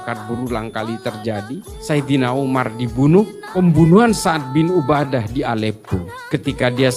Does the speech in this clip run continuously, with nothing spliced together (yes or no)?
no